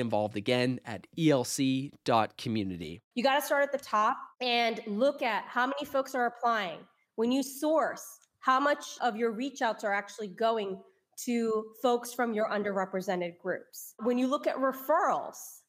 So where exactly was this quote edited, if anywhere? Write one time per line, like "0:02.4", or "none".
0:02.9
0:04.3
0:08.9
0:14.0

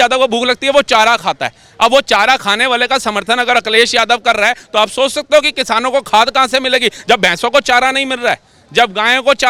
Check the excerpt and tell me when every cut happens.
none

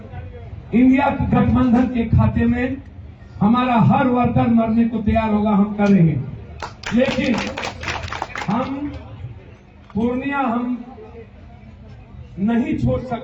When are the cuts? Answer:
none

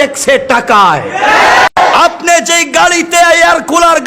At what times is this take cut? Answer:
0:01.7

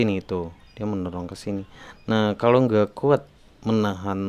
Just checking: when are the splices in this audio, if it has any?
none

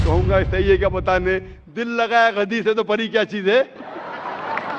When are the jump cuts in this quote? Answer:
none

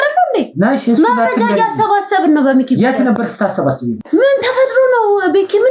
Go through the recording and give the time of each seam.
0:04.0

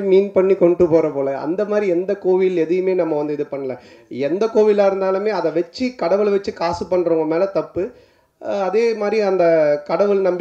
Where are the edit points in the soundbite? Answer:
none

